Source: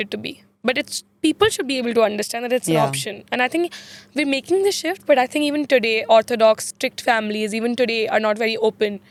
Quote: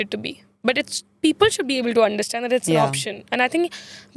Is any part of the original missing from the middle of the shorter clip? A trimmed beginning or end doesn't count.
no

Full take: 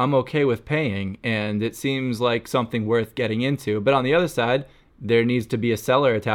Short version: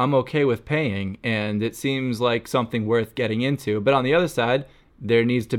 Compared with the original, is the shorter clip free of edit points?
yes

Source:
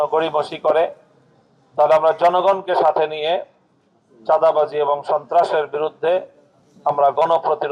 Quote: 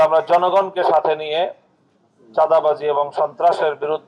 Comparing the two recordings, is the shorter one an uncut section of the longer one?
yes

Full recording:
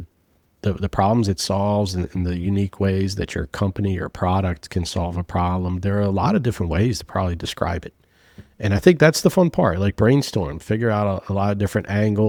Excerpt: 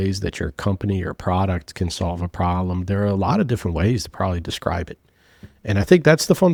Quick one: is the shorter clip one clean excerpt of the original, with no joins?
yes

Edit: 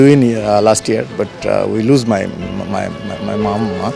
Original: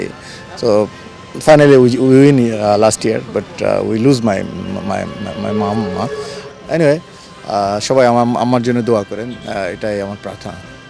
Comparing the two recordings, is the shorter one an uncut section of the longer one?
yes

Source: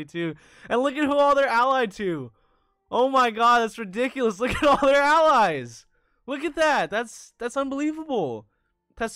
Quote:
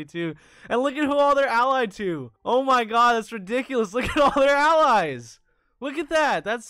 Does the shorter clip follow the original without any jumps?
no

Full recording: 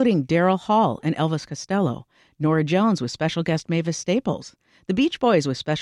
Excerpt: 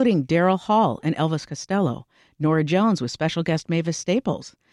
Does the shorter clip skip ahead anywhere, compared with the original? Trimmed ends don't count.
no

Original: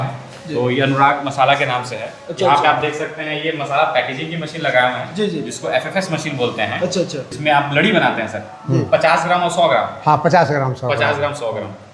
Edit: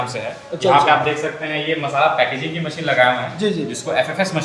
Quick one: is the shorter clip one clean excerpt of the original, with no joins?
yes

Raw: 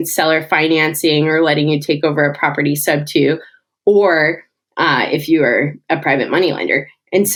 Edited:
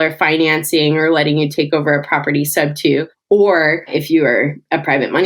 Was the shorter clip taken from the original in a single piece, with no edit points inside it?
no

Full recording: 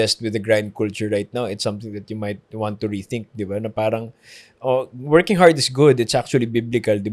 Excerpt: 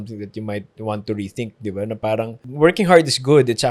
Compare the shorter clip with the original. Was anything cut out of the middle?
yes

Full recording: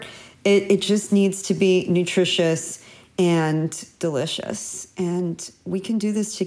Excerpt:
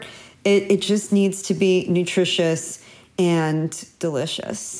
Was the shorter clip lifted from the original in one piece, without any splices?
yes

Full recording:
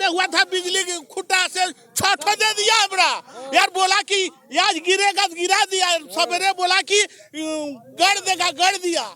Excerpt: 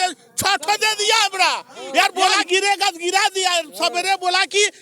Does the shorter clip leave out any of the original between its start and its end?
yes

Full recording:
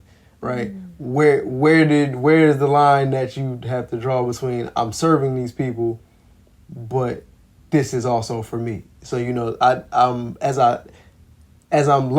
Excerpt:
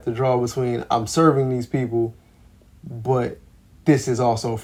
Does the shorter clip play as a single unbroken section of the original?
yes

